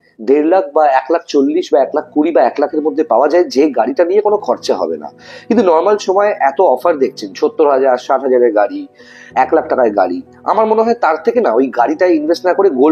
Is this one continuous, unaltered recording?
yes; 0 cuts

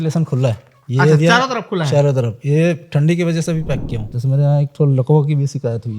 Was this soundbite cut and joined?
yes; 1 cut; at 4.1 s

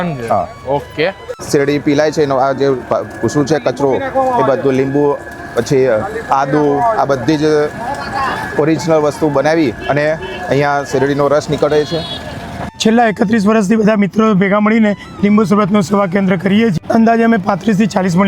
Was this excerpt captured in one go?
no; 3 cuts; at 1.3 s, 12.6 s, 16.7 s

